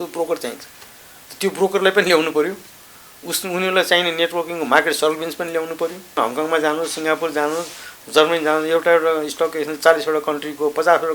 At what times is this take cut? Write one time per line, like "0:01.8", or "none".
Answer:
0:06.2